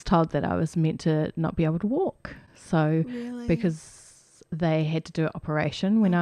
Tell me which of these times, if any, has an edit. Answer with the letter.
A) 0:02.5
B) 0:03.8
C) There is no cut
C